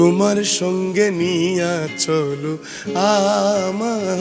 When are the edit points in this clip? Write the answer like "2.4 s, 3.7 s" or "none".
none